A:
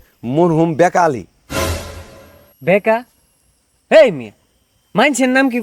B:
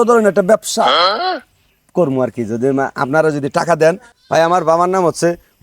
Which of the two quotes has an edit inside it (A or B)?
B